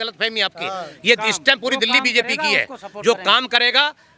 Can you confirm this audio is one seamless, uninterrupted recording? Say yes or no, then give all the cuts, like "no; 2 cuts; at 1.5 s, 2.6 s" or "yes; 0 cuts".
yes; 0 cuts